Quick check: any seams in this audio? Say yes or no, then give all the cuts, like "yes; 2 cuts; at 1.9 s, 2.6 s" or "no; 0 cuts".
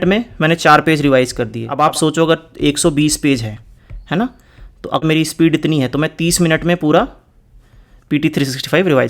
yes; 2 cuts; at 1.6 s, 5.0 s